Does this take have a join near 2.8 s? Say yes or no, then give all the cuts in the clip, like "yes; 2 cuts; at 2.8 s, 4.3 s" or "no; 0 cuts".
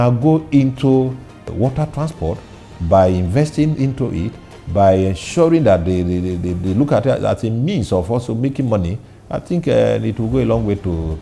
no; 1 cut; at 1.5 s